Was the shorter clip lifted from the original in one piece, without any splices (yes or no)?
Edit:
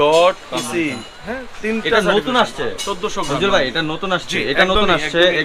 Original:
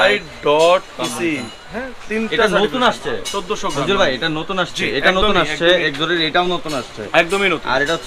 yes